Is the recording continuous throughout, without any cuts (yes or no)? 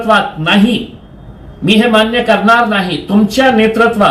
yes